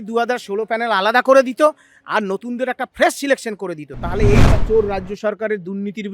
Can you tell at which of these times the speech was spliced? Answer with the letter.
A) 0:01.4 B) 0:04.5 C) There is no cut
B